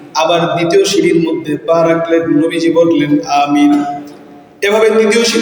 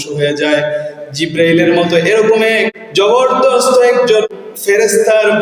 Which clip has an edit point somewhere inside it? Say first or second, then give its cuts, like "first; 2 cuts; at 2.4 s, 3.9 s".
second; 2 cuts; at 2.8 s, 4.3 s